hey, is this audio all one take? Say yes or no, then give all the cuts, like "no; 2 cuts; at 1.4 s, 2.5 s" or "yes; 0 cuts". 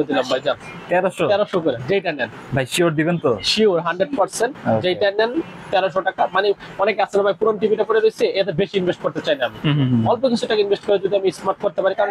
yes; 0 cuts